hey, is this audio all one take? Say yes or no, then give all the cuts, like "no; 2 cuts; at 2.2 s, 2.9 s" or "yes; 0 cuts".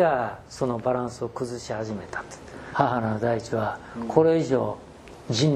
no; 1 cut; at 2.6 s